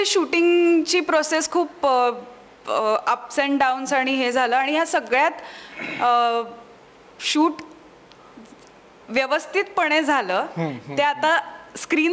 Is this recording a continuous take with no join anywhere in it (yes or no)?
yes